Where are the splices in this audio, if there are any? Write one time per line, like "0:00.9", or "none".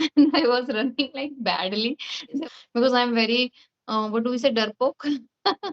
0:02.4